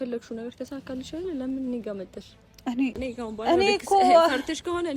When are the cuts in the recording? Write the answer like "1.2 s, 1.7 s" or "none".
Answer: 2.9 s